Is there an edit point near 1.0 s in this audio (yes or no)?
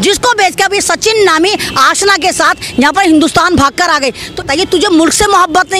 no